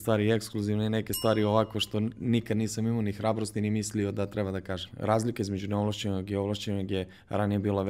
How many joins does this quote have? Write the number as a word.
one